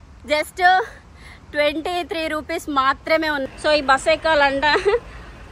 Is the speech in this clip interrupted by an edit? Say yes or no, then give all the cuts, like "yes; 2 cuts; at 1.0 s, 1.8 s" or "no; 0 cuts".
yes; 1 cut; at 3.4 s